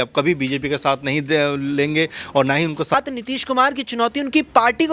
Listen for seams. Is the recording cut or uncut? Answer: cut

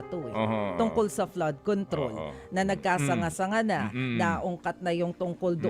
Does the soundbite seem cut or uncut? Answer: uncut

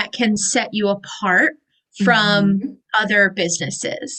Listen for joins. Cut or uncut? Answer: uncut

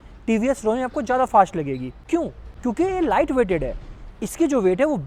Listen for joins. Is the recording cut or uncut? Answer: uncut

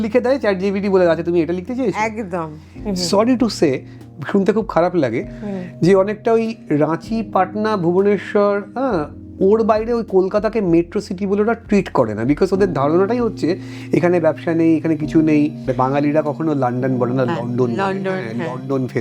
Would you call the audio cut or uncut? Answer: cut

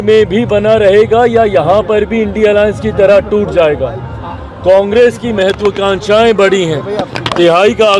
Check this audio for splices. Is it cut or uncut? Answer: uncut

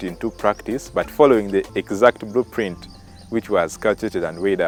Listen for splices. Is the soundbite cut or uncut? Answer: uncut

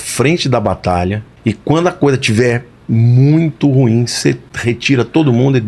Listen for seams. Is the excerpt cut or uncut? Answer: cut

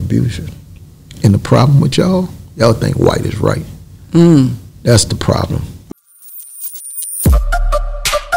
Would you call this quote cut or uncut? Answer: cut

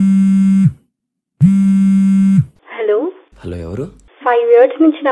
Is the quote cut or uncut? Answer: cut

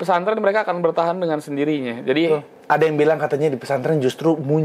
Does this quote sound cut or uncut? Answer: cut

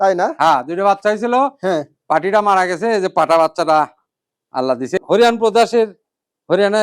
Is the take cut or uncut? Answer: cut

